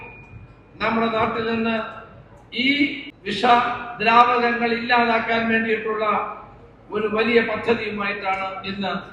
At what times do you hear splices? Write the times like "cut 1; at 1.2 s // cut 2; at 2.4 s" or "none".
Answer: cut 1; at 3.1 s